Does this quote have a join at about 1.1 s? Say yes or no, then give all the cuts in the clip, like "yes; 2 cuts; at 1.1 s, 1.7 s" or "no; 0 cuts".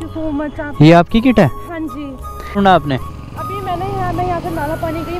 no; 1 cut; at 2.6 s